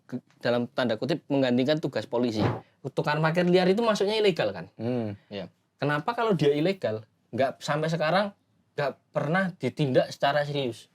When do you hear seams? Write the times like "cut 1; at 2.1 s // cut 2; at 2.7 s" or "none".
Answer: cut 1; at 2.5 s